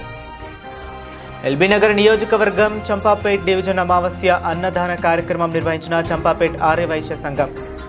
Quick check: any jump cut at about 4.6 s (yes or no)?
no